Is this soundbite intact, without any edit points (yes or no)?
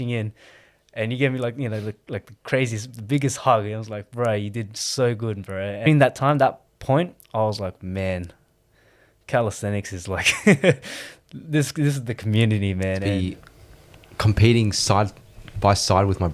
no